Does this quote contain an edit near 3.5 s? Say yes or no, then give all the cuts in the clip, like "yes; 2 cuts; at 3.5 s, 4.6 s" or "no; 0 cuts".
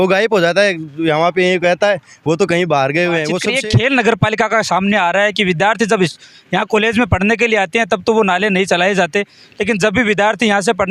yes; 1 cut; at 3.5 s